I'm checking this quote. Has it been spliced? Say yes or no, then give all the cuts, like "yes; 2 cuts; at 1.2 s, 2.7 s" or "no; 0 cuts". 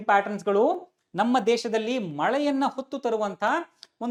no; 0 cuts